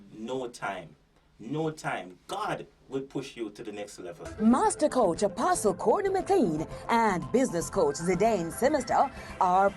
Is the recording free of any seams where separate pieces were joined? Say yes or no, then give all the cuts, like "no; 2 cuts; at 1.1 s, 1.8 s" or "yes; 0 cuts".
no; 1 cut; at 4.2 s